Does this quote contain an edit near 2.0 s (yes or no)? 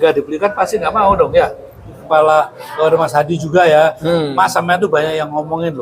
yes